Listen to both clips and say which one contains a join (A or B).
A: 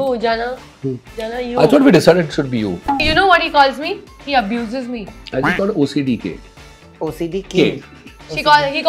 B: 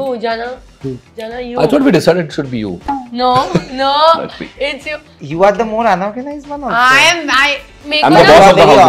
A